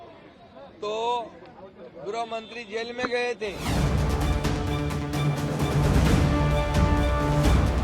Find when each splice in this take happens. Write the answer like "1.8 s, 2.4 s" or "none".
3.7 s, 6.5 s